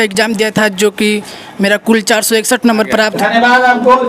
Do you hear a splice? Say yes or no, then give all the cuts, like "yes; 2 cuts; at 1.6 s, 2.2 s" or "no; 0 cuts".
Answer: yes; 1 cut; at 3.1 s